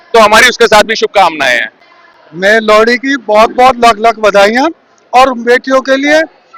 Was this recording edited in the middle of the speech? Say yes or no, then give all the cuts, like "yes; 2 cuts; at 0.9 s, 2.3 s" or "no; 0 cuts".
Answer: no; 0 cuts